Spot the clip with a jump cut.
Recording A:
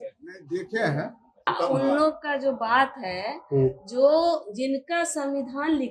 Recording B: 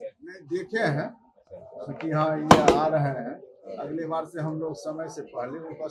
A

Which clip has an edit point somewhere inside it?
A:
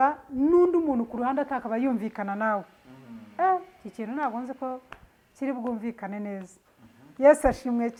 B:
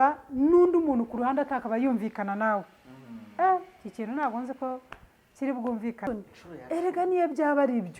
B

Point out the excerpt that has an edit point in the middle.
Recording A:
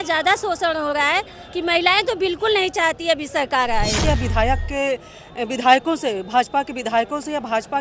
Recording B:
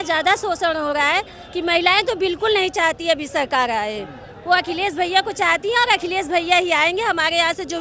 A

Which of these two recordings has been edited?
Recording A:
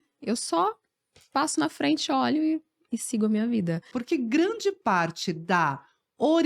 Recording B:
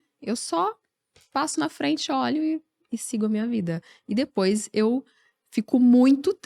A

